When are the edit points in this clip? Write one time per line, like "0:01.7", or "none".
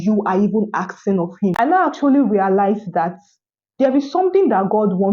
0:01.5